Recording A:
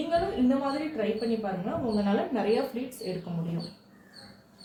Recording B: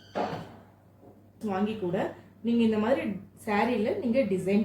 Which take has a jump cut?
B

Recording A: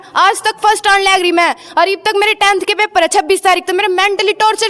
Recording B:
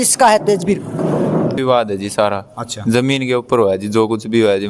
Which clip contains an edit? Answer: B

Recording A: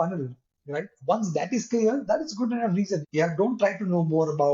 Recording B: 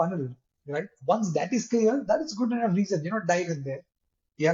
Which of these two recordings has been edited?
A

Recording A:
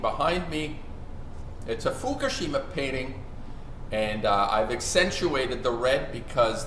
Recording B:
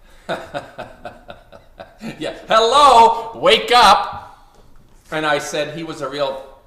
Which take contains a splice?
B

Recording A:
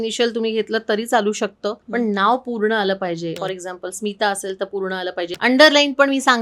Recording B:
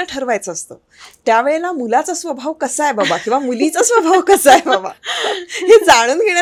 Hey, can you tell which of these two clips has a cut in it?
A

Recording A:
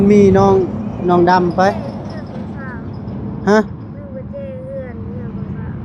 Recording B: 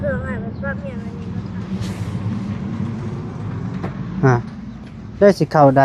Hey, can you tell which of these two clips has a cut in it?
B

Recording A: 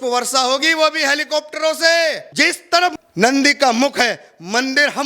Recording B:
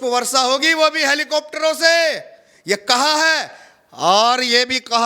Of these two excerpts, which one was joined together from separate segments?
A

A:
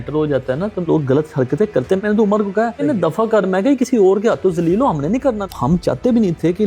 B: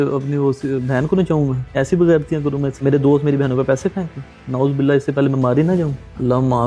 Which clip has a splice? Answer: A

